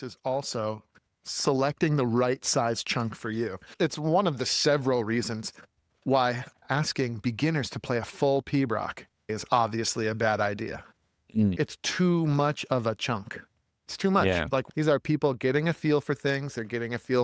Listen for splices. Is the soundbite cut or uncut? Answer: cut